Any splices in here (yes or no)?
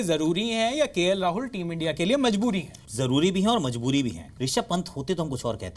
yes